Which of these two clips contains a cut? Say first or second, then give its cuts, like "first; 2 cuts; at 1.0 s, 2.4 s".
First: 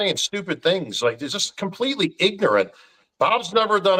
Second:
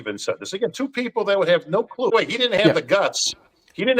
second; 1 cut; at 2.1 s